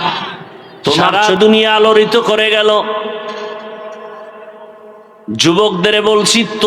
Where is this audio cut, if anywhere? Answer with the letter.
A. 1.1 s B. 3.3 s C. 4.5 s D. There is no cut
A